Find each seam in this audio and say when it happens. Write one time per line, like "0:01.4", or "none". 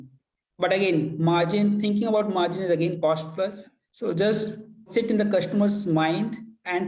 0:03.0
0:04.8